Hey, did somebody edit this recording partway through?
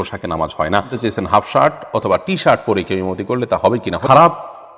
yes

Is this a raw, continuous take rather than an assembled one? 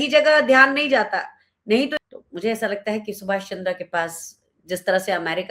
no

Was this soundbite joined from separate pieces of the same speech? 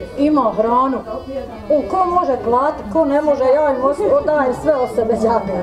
no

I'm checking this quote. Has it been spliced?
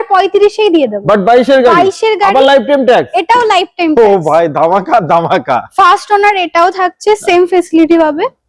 no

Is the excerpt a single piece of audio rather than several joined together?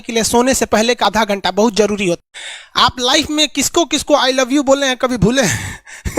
no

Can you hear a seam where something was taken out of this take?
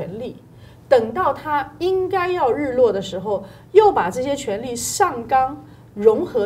no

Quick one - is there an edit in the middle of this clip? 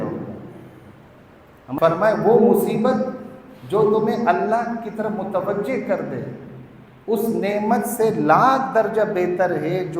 yes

